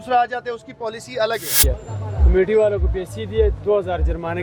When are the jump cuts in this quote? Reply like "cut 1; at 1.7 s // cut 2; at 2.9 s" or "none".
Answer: cut 1; at 1.7 s